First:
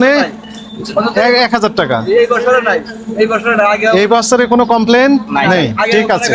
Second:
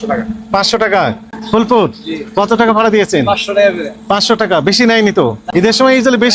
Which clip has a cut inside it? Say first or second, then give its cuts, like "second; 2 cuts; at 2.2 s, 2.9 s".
second; 2 cuts; at 1.3 s, 5.4 s